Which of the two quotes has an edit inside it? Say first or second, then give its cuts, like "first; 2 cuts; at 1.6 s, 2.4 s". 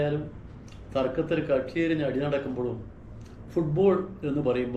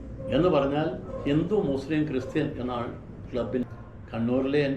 second; 1 cut; at 3.6 s